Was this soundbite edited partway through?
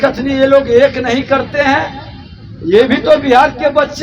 no; 0 cuts

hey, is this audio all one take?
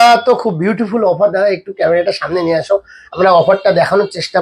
yes; 0 cuts

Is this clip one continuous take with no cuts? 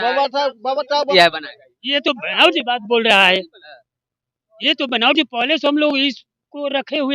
no; 1 cut; at 1.1 s

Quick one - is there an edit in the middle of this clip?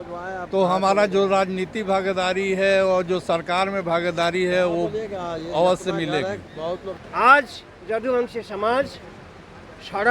yes; 1 cut; at 6.9 s

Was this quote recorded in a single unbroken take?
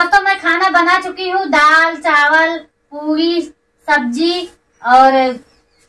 yes; 0 cuts

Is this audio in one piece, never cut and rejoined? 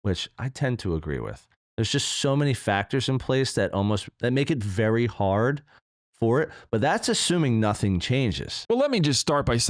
no; 1 cut; at 8.6 s

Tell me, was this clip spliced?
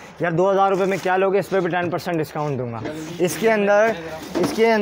no; 0 cuts

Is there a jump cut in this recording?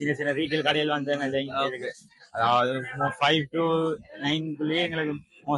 no; 0 cuts

